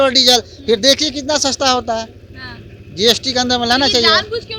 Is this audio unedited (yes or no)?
yes